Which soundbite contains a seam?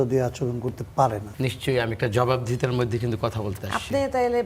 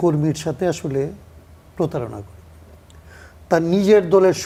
first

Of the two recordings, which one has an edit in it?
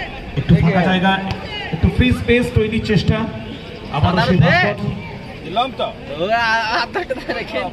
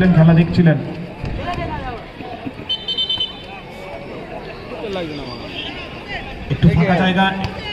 second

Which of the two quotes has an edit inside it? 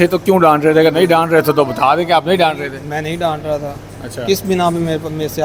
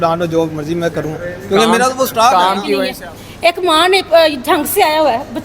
second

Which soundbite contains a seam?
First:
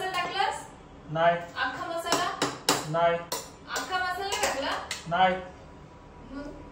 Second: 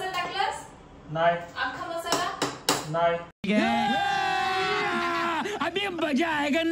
first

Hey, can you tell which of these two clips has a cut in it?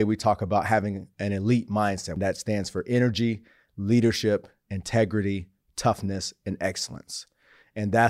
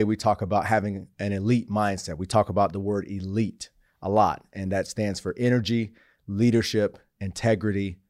first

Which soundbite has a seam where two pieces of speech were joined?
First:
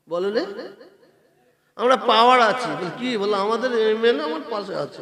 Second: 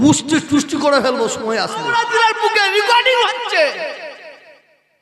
second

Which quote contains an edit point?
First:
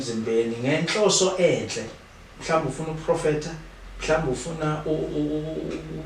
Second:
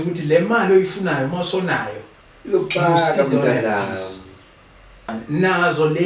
second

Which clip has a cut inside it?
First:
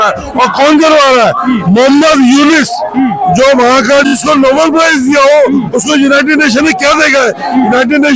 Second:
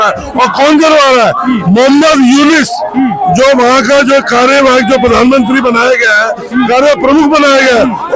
first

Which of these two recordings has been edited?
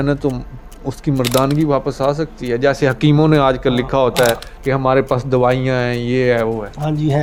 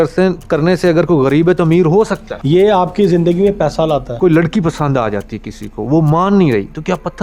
second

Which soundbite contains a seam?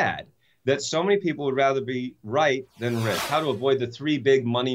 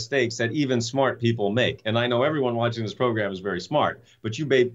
first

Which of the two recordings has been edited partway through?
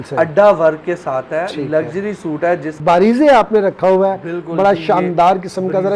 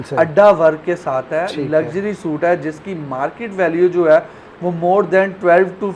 first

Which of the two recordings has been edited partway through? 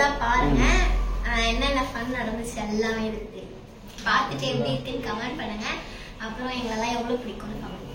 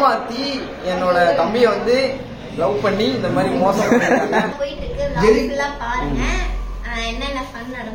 second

